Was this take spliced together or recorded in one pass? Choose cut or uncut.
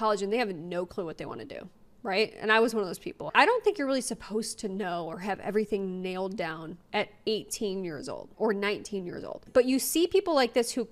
uncut